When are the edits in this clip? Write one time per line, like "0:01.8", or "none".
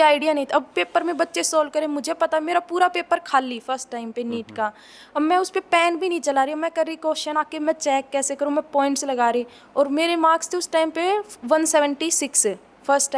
none